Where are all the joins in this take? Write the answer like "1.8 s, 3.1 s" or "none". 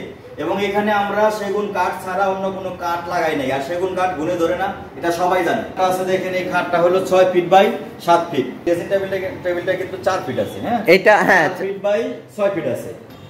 5.7 s, 8.6 s